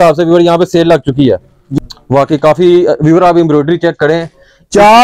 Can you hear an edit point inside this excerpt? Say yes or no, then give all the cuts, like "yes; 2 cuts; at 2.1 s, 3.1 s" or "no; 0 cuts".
yes; 1 cut; at 1.6 s